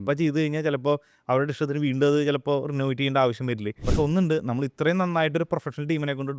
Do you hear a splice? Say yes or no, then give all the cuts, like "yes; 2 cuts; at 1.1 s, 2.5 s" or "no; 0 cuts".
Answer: yes; 1 cut; at 3.8 s